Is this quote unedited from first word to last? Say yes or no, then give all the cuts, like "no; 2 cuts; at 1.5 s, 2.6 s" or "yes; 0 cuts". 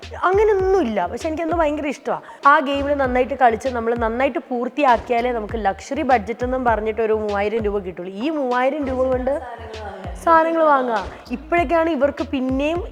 no; 1 cut; at 2.3 s